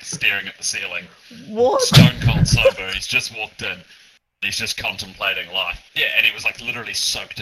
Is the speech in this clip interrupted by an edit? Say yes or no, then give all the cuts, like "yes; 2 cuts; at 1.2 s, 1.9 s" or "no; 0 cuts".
yes; 1 cut; at 5.8 s